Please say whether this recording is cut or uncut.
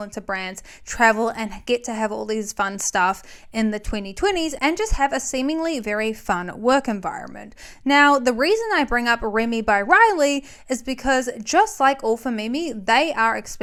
uncut